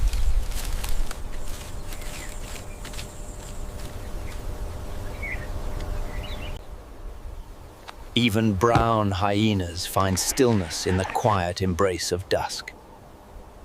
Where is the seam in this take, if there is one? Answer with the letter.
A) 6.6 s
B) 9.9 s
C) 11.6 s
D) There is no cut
A